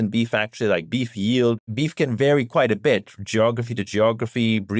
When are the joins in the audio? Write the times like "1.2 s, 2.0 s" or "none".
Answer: 1.6 s